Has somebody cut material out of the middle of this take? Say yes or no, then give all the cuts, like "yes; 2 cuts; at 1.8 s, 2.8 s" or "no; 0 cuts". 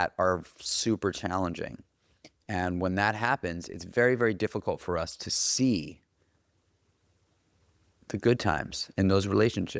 no; 0 cuts